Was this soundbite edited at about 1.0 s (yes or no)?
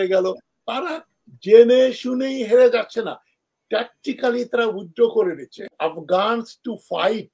no